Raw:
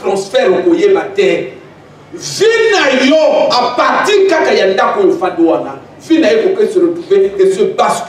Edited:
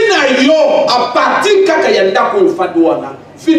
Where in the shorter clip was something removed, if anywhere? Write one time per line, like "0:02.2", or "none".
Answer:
none